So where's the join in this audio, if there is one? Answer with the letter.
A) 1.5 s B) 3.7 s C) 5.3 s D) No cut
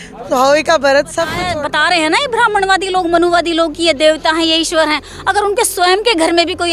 A